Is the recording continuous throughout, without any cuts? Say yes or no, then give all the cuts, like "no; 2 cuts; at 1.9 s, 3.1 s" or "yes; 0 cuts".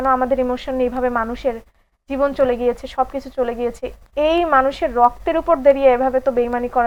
yes; 0 cuts